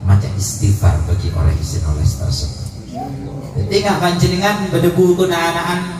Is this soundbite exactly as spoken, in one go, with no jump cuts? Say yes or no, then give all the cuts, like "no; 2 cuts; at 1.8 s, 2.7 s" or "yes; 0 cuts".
yes; 0 cuts